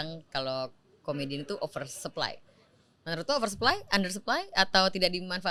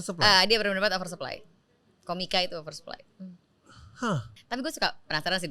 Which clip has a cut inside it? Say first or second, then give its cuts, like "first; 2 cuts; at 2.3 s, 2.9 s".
second; 1 cut; at 4.3 s